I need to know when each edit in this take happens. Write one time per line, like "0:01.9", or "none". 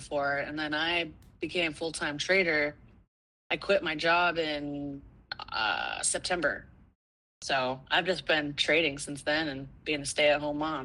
none